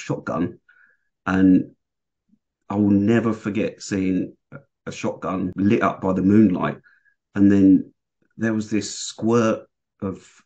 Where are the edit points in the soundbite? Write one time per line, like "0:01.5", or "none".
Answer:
0:05.5